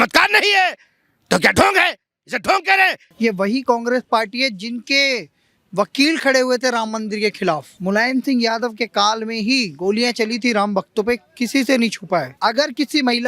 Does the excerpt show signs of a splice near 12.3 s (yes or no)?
yes